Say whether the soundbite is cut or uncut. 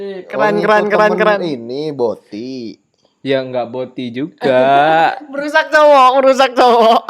uncut